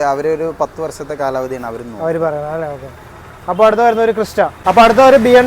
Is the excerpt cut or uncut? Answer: cut